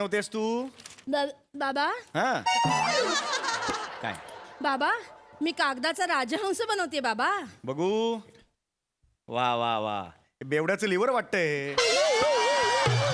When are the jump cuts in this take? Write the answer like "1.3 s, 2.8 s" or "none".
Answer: none